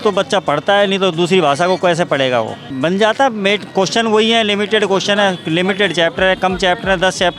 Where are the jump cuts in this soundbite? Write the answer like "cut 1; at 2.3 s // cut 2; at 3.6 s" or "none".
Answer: cut 1; at 2.6 s